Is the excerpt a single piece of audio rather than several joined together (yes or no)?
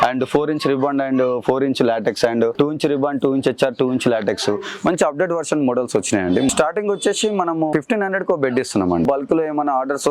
no